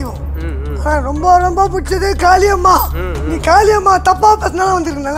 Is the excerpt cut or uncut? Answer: uncut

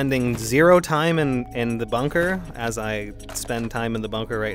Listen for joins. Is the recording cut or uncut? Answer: uncut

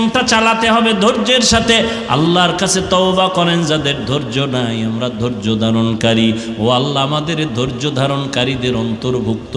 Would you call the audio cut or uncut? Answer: uncut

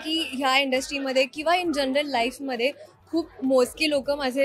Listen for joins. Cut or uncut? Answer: uncut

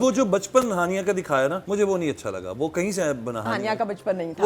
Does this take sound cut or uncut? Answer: cut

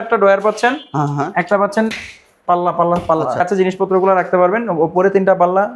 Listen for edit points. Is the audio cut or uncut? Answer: cut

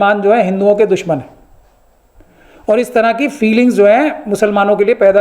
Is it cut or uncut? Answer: uncut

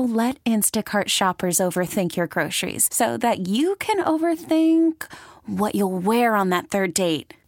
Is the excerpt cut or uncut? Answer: uncut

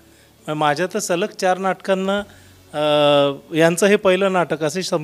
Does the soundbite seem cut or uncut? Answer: uncut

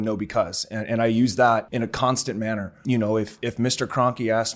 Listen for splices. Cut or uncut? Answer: cut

